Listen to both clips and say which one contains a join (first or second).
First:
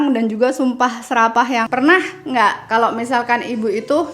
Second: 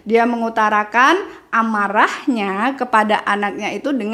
first